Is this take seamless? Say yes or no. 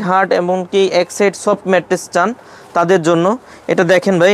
yes